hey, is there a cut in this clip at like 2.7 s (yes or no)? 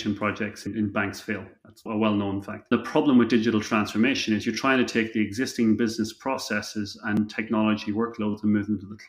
yes